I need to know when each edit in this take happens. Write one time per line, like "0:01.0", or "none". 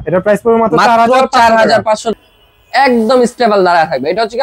0:02.1